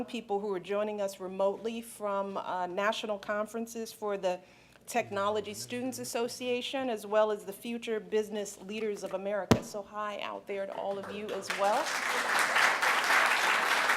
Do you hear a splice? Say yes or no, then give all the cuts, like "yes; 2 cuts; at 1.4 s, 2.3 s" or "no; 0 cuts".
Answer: yes; 1 cut; at 1.2 s